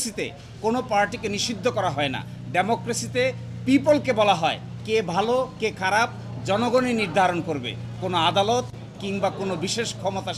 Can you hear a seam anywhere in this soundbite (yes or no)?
no